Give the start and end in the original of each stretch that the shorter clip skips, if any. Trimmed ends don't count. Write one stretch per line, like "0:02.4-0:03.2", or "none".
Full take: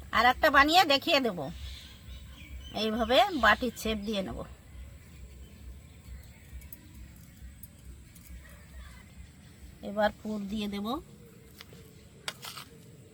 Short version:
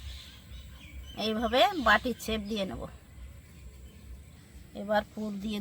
0:05.9-0:09.4